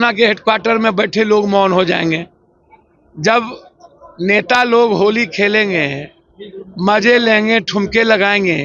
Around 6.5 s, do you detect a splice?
no; 0 cuts

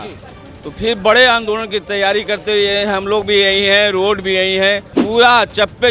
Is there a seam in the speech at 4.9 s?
yes; 1 cut; at 4.9 s

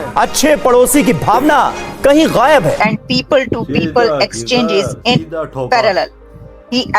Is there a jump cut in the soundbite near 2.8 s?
yes; 1 cut; at 2.8 s

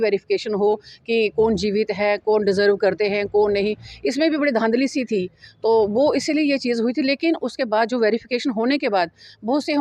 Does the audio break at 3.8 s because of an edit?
no; 0 cuts

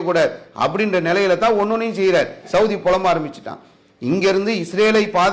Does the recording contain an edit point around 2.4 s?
yes; 1 cut; at 2.4 s

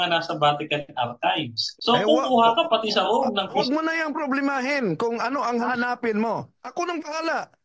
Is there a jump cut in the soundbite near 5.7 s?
yes; 4 cuts; at 1.6 s, 3.6 s, 5.7 s, 6.6 s

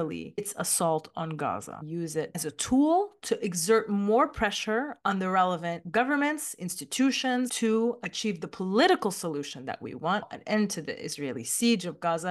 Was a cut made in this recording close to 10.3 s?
yes; 3 cuts; at 2.2 s, 7.5 s, 10.3 s

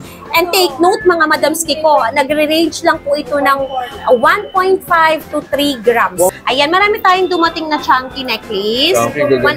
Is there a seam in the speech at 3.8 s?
no; 1 cut; at 6.3 s

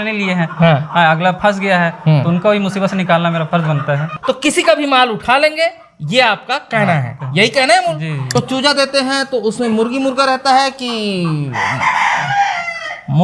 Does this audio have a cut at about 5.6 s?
no; 2 cuts; at 4.1 s, 8.2 s

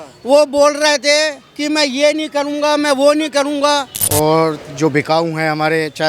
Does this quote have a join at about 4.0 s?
yes; 1 cut; at 4.0 s

